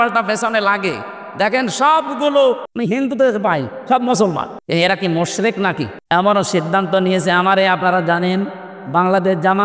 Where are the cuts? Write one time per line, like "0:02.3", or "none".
0:02.7
0:04.5
0:06.0